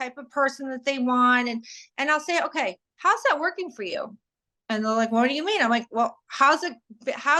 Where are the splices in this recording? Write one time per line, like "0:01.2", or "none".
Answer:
none